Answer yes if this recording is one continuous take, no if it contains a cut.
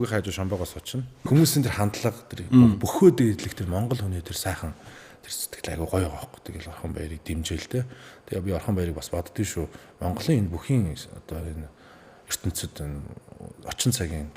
no